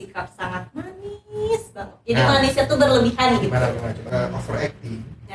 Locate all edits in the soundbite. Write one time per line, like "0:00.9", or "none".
0:04.1